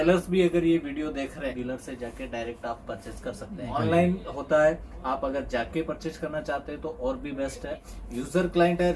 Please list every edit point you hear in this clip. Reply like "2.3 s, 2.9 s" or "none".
1.5 s, 3.7 s, 7.9 s